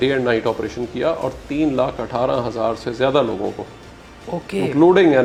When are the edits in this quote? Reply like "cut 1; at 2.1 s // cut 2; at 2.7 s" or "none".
none